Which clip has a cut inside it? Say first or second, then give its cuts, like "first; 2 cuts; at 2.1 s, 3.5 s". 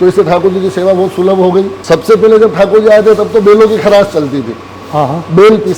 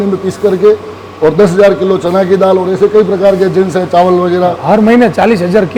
first; 1 cut; at 1.8 s